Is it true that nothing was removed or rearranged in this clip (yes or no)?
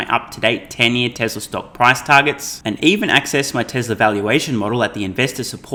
yes